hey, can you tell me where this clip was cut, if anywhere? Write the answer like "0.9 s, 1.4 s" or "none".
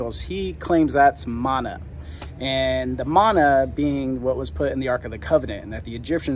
none